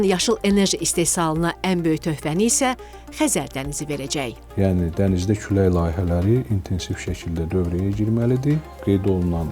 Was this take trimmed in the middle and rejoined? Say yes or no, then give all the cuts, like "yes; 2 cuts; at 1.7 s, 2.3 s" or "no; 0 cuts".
yes; 1 cut; at 4.4 s